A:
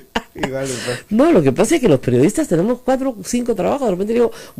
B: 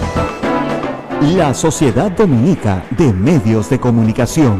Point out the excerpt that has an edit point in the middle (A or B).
B